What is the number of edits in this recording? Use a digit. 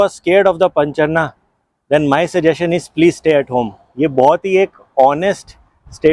0